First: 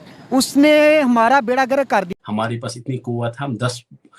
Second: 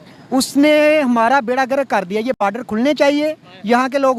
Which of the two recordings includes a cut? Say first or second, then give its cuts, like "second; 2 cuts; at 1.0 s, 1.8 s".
first; 1 cut; at 2.1 s